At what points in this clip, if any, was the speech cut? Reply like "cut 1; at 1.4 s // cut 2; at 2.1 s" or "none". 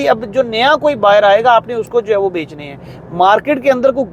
none

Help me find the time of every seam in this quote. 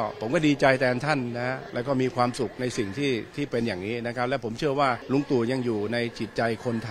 cut 1; at 1.6 s // cut 2; at 5.0 s

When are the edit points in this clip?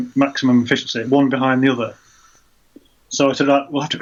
none

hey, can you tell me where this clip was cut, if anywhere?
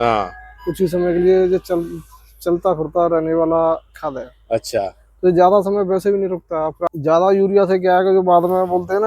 cut 1; at 6.8 s

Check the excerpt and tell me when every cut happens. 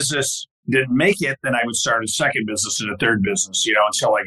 none

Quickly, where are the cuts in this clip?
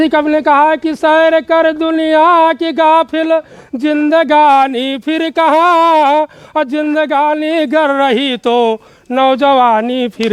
none

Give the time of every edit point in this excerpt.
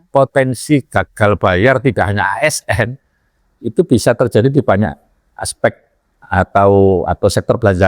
none

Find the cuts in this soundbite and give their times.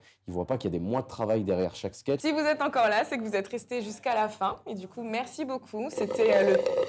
cut 1; at 2.2 s

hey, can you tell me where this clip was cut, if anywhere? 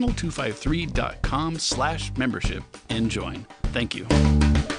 none

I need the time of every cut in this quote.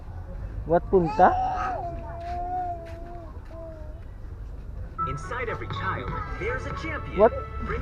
none

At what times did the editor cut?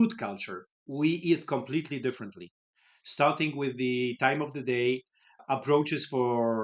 none

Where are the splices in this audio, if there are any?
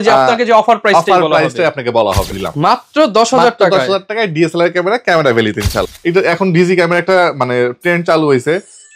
cut 1; at 2.4 s // cut 2; at 5.9 s

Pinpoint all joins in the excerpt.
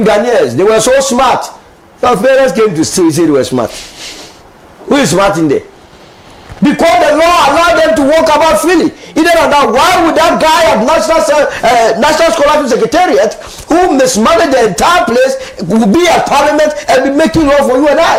none

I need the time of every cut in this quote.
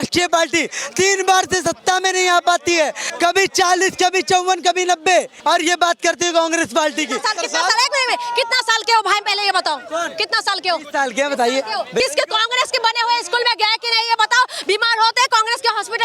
cut 1; at 3.0 s // cut 2; at 5.3 s // cut 3; at 7.2 s // cut 4; at 12.0 s

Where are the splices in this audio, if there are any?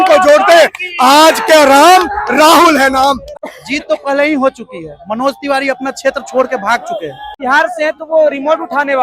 cut 1; at 3.3 s // cut 2; at 7.3 s

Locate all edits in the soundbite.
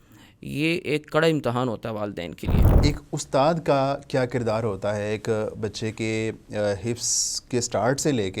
cut 1; at 2.7 s

